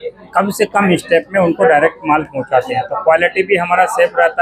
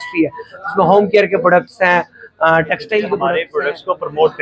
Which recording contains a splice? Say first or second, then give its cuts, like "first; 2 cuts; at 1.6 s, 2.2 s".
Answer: second; 1 cut; at 3.4 s